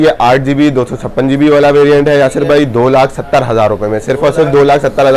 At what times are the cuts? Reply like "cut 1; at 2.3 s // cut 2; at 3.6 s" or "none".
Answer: none